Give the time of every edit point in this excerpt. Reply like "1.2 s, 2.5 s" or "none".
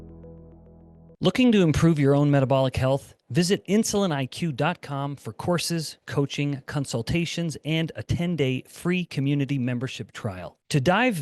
1.0 s